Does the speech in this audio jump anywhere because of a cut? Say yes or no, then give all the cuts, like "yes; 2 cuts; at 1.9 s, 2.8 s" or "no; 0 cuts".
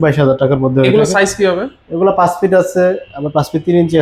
no; 0 cuts